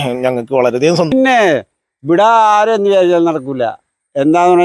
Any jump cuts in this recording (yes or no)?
yes